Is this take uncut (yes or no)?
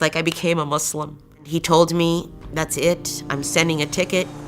no